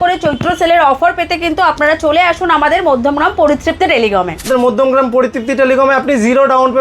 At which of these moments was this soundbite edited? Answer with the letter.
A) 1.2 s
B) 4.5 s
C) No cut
B